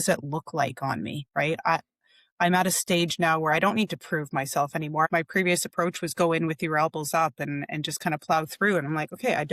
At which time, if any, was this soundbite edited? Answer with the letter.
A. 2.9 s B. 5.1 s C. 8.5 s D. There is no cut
B